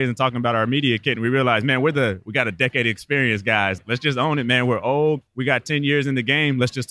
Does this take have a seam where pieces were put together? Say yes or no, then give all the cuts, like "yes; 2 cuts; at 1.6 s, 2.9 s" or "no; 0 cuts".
yes; 1 cut; at 3.8 s